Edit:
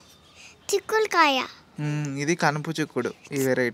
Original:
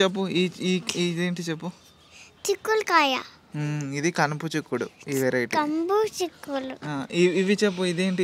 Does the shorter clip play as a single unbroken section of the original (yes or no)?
yes